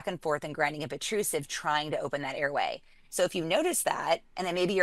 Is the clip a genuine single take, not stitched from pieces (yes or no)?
yes